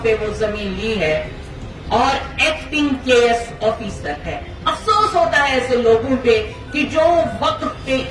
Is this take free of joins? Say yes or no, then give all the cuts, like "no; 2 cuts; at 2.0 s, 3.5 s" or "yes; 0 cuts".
yes; 0 cuts